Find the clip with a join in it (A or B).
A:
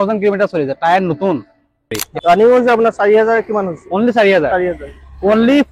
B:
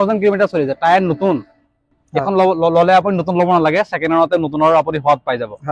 A